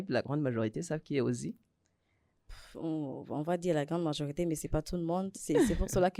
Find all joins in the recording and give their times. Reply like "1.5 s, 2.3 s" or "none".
none